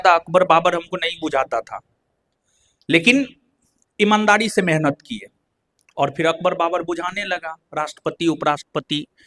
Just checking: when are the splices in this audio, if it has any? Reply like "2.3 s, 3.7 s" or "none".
none